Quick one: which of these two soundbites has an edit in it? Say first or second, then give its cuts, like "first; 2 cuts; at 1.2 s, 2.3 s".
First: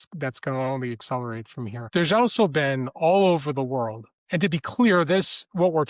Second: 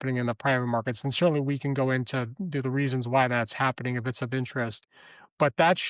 first; 1 cut; at 1.8 s